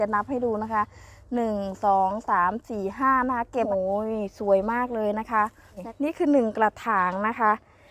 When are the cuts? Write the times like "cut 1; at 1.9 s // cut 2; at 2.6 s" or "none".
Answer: cut 1; at 3.7 s // cut 2; at 5.9 s